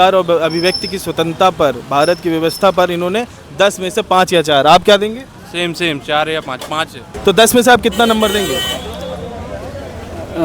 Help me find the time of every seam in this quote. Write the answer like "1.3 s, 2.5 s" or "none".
7.1 s